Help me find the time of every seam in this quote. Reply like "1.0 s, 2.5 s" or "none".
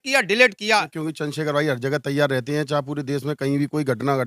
0.9 s